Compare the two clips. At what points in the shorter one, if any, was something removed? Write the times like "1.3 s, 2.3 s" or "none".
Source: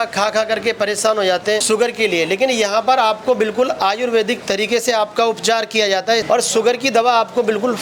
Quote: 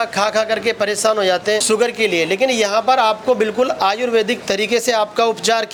none